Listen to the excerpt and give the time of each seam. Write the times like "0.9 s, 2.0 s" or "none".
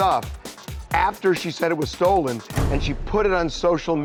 none